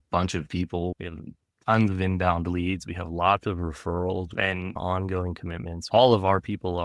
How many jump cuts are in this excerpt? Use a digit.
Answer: 3